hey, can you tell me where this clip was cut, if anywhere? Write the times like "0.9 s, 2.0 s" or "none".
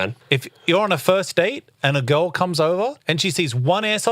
3.0 s